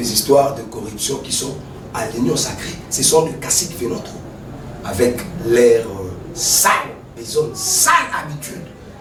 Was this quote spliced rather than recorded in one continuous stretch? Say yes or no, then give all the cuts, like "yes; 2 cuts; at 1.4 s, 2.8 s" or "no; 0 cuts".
no; 0 cuts